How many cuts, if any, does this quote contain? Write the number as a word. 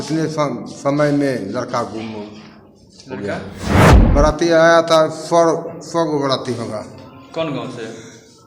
one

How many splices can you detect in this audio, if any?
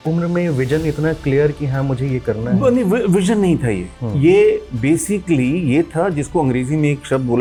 zero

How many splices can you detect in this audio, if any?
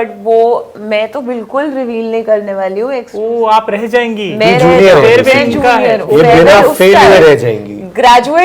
one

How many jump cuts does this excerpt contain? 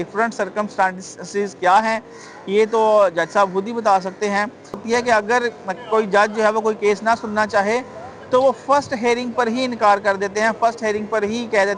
one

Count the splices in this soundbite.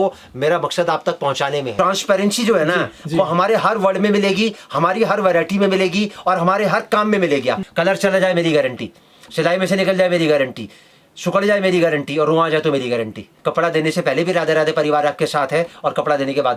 three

